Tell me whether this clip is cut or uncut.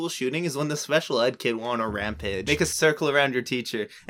cut